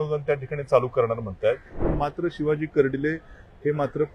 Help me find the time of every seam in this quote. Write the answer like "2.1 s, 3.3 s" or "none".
1.9 s